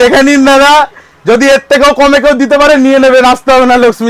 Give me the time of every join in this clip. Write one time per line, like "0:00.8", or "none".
none